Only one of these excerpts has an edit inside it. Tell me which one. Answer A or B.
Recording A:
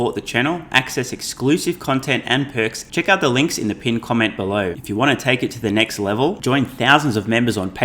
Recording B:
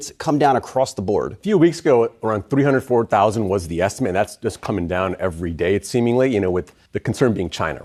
A